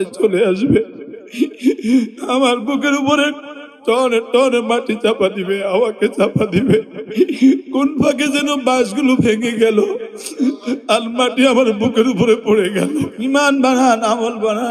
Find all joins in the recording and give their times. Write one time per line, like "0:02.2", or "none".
0:13.1